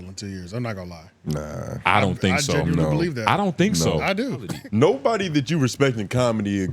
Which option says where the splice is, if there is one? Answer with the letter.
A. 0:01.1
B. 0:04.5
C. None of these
B